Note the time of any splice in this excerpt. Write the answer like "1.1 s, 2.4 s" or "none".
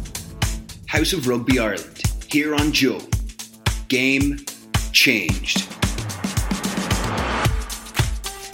none